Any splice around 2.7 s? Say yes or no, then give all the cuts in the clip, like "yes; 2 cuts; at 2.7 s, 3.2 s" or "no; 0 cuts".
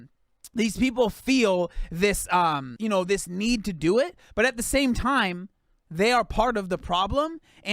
yes; 1 cut; at 2.7 s